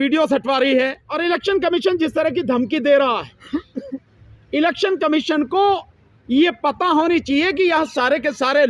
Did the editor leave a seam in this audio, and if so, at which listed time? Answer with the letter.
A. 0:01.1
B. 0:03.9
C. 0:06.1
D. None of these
A